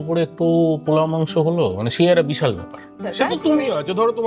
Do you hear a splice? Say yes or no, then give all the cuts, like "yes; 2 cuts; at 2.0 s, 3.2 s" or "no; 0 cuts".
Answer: yes; 1 cut; at 3.0 s